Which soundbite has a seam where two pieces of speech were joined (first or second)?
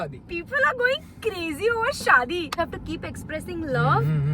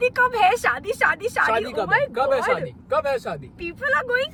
first